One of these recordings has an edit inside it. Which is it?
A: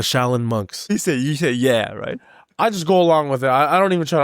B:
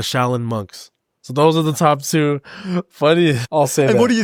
A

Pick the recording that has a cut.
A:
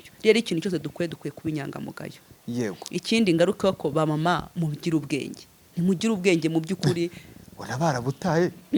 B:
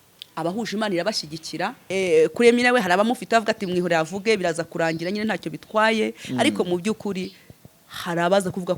B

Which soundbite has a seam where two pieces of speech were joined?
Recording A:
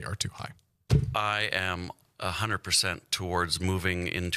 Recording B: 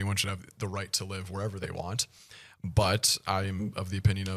A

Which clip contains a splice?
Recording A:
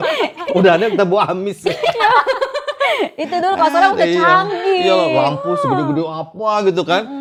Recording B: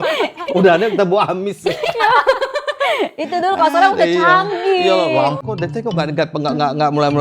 B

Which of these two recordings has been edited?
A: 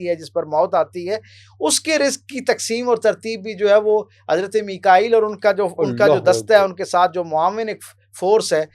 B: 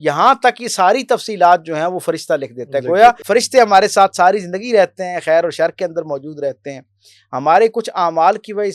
B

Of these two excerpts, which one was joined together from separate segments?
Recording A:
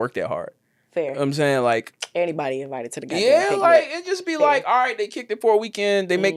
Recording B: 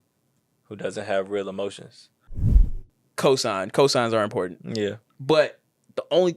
B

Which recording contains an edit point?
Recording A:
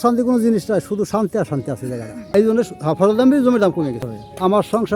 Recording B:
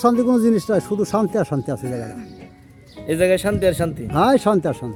A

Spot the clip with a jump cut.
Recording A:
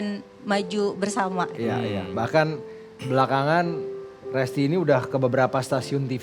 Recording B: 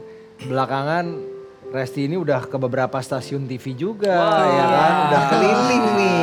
A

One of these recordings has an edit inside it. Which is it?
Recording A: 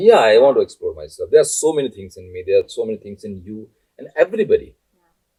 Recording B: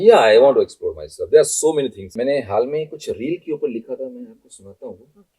B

